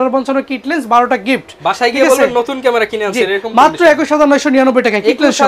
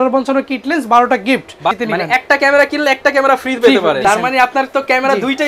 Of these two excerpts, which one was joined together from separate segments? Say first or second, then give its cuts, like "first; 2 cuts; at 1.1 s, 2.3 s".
second; 2 cuts; at 1.8 s, 4.0 s